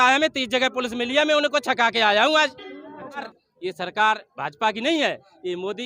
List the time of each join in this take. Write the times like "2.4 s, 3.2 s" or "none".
3.4 s